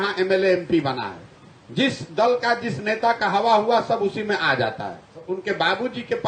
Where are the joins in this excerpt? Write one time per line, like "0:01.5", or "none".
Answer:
0:05.3